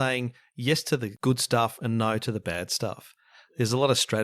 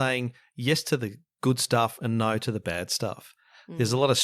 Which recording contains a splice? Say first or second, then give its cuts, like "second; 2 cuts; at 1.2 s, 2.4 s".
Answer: first; 1 cut; at 1.1 s